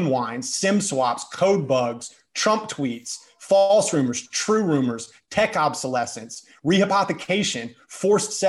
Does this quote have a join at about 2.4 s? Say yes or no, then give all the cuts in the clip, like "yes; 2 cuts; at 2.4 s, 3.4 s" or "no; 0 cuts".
no; 0 cuts